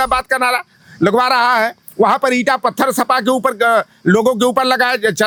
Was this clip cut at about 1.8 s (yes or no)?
no